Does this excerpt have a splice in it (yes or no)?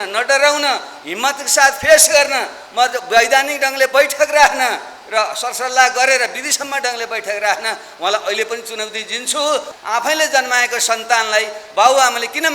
yes